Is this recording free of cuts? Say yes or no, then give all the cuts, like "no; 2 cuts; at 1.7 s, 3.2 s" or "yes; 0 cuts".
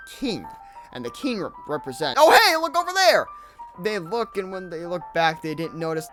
yes; 0 cuts